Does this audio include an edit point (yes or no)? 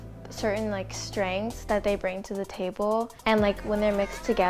yes